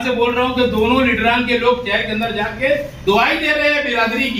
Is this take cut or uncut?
uncut